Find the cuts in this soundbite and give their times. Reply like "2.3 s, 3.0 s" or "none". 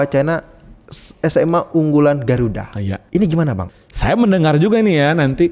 3.0 s, 3.7 s